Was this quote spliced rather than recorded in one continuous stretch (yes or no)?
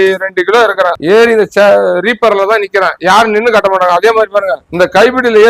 yes